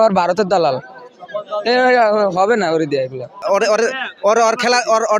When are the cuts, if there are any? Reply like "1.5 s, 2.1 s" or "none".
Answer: 3.4 s